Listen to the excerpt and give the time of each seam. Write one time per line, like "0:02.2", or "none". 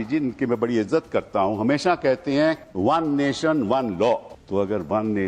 0:02.7
0:04.3